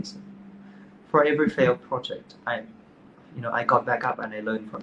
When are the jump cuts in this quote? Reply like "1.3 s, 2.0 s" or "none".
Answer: none